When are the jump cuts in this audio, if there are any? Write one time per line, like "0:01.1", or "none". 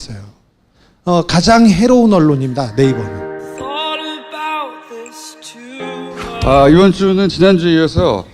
0:02.9